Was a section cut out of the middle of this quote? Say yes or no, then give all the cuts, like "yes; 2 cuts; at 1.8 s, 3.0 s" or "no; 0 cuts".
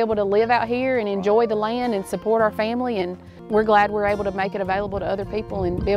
yes; 1 cut; at 3.3 s